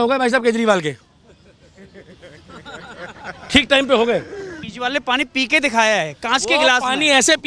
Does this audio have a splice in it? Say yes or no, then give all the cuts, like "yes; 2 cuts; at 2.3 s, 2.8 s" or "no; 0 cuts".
yes; 1 cut; at 4.7 s